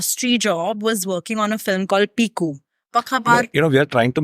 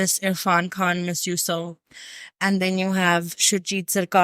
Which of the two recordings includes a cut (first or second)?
first